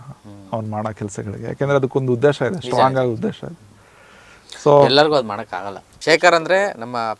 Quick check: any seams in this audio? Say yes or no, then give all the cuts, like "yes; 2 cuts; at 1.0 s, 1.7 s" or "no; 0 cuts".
yes; 1 cut; at 6.0 s